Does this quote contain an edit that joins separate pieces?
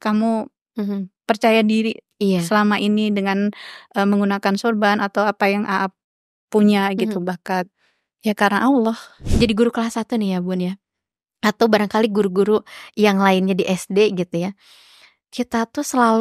yes; 1 cut; at 9.3 s

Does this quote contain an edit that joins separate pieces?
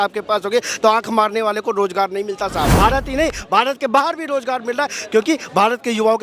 yes; 1 cut; at 2.7 s

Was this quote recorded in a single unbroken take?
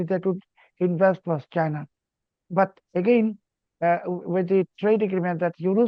yes; 0 cuts

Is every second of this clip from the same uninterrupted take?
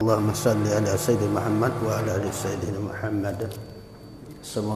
yes; 0 cuts

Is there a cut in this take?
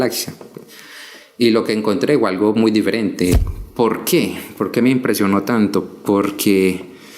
yes; 1 cut; at 3.4 s

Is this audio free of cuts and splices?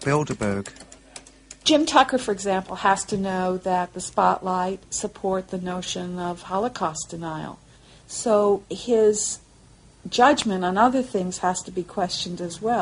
no; 1 cut; at 6.5 s

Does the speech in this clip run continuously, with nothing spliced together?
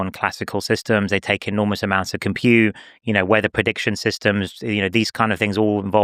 yes; 0 cuts

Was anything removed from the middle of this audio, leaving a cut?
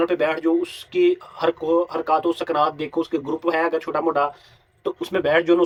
no; 0 cuts

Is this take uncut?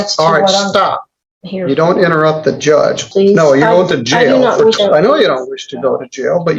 no; 2 cuts; at 3.1 s, 4.8 s

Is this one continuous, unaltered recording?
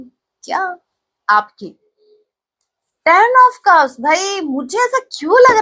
yes; 0 cuts

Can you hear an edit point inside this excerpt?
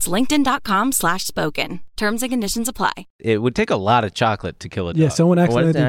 yes; 1 cut; at 3.1 s

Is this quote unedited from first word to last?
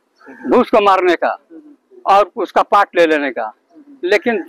yes; 0 cuts

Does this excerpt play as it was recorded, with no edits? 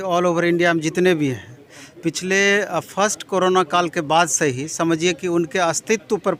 yes; 0 cuts

